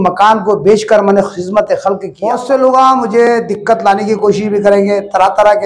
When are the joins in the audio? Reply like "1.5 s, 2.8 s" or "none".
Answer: 2.1 s